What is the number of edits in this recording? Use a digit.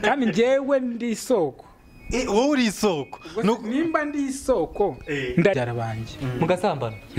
1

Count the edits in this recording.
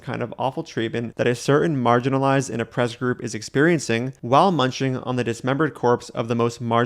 2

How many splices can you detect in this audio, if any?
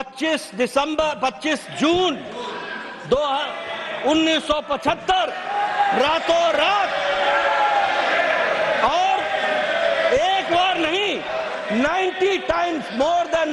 0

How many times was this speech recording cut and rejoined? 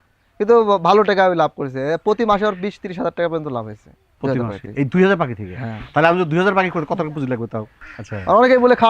1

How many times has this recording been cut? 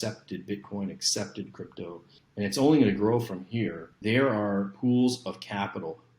1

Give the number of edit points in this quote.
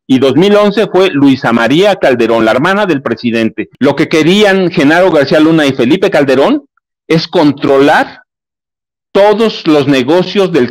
1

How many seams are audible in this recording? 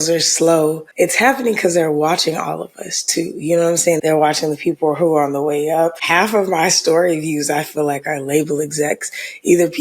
3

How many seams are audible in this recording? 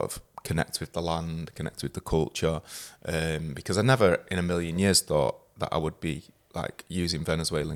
0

